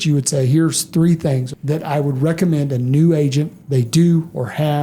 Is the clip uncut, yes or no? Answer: no